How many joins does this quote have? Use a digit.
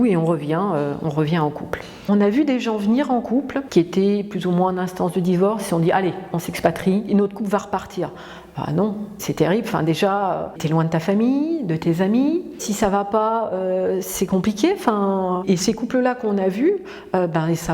6